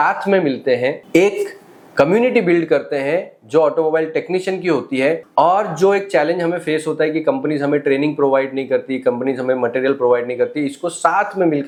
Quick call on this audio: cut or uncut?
uncut